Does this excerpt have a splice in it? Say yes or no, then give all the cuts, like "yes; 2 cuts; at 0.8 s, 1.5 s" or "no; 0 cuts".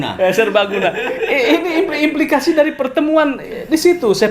no; 0 cuts